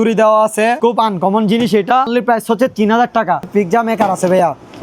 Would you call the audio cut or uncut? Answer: cut